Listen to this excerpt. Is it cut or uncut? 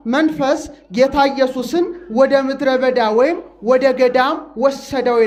uncut